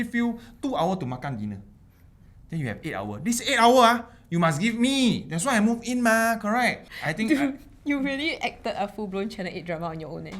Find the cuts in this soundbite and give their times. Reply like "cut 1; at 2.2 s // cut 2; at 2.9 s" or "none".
cut 1; at 6.9 s